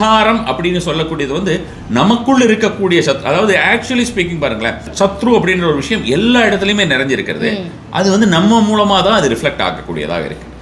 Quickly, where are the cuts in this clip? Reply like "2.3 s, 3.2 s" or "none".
4.9 s